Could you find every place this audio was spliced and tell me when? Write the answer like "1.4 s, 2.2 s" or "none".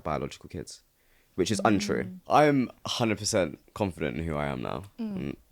2.1 s, 2.8 s